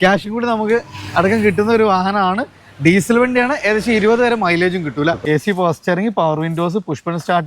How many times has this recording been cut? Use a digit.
1